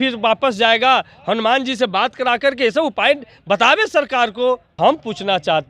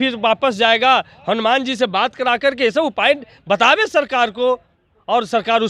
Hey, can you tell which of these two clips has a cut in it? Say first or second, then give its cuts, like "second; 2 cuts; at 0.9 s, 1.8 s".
first; 1 cut; at 4.8 s